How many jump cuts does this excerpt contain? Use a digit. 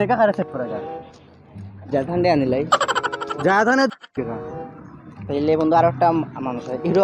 1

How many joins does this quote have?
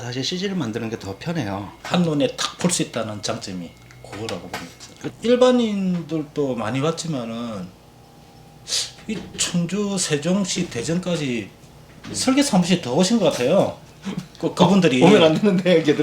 1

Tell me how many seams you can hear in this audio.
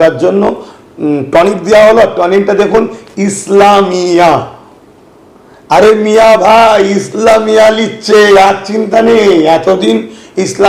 0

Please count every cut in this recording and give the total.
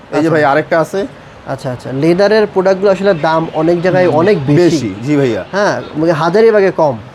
0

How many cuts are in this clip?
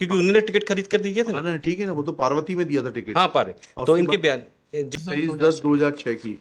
1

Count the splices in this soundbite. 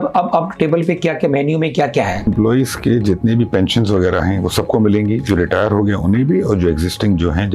1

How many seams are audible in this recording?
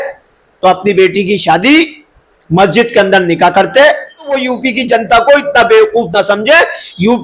1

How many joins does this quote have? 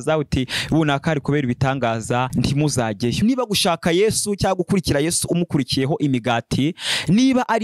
1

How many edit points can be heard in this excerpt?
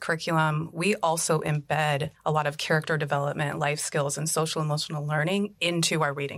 1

